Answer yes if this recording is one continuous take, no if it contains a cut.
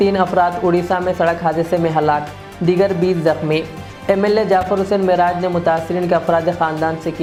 yes